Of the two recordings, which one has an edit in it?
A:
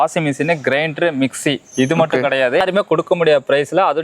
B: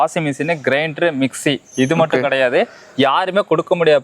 A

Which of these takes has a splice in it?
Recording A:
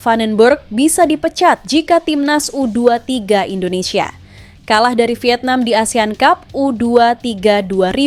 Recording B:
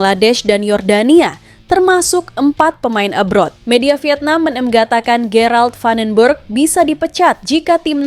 B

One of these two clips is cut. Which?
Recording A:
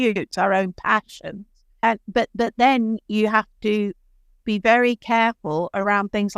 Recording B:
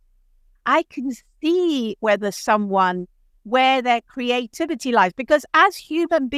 A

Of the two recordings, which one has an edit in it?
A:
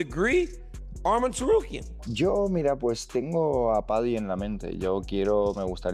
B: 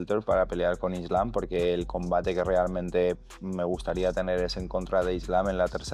A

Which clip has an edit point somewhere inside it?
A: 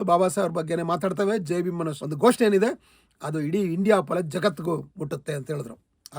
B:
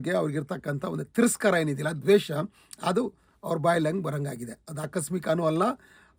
A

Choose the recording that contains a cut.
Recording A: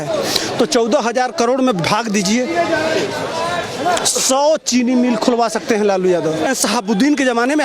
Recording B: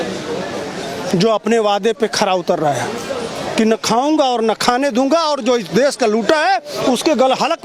A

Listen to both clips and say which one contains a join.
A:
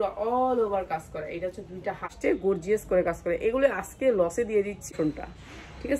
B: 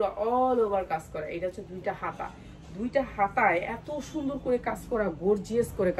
A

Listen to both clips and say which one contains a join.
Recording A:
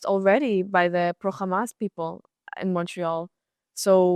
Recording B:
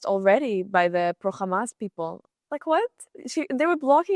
B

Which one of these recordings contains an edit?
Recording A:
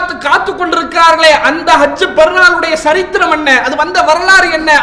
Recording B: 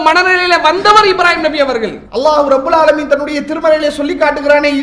B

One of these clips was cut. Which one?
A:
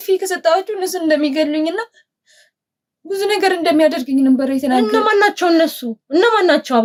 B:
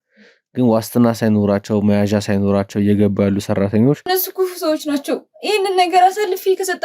B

